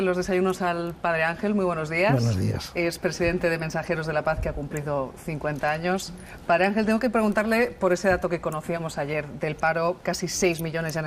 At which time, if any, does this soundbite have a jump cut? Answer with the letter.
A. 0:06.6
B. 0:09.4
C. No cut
C